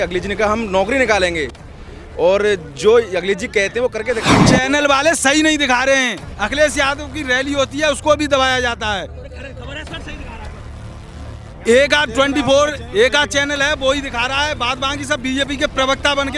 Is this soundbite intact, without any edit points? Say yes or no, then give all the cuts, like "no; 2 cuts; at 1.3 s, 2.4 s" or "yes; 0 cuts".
no; 1 cut; at 4.2 s